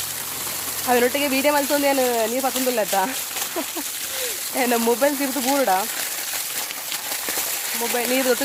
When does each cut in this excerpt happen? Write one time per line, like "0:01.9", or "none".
none